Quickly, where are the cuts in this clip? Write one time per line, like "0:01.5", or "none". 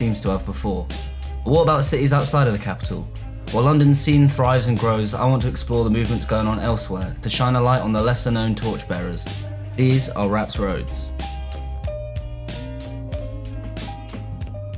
none